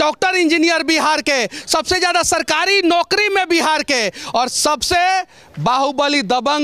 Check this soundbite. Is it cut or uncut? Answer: uncut